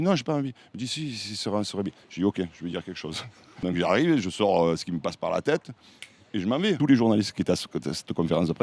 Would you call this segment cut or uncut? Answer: cut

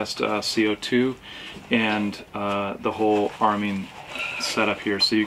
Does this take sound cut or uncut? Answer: uncut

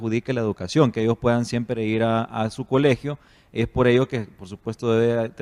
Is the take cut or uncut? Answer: uncut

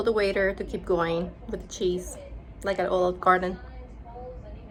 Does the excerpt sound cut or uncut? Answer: uncut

